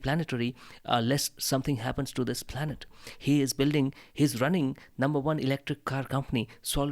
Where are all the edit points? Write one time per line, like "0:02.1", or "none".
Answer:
none